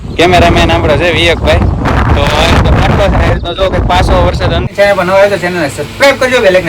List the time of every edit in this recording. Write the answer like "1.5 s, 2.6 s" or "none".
4.7 s